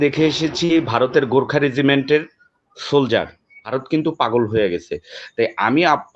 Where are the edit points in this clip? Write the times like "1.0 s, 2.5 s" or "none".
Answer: 3.7 s